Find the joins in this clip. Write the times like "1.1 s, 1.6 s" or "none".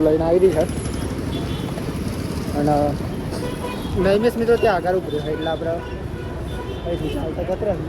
none